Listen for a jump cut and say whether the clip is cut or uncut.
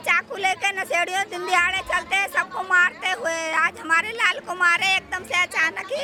uncut